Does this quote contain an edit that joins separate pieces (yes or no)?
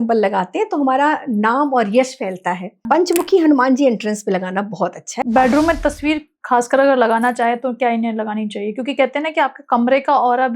yes